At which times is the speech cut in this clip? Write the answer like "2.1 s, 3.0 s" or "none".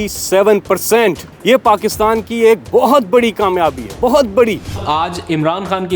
1.3 s, 4.8 s